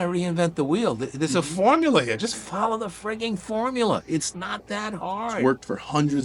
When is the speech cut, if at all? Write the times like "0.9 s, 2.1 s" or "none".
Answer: none